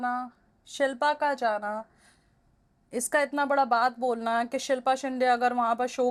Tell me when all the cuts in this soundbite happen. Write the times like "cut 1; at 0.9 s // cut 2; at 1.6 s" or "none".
none